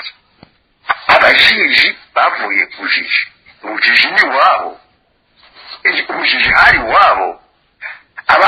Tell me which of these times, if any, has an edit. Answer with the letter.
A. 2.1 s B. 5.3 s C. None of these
C